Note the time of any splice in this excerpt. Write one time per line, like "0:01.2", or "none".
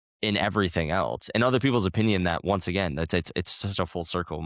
none